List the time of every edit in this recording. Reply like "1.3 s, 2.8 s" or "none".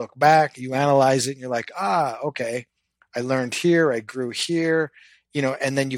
none